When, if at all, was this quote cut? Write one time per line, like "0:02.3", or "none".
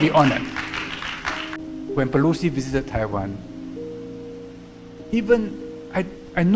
0:01.9
0:03.4
0:05.1